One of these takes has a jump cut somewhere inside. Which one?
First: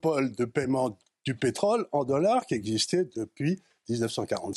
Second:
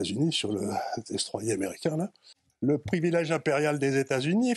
second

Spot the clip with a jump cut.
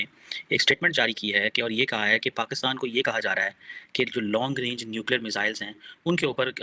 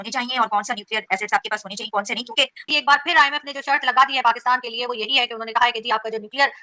second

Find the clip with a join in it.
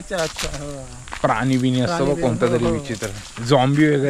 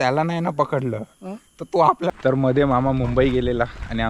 second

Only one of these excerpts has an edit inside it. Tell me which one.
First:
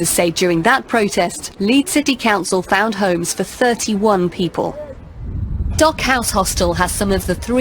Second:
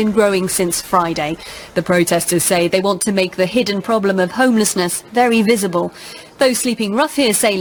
first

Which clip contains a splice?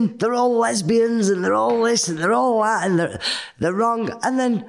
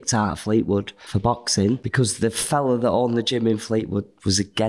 second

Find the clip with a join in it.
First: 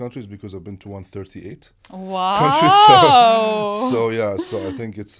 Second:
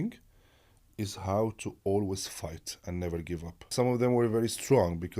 second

